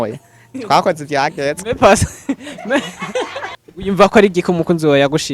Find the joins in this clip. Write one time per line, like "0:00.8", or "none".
0:03.6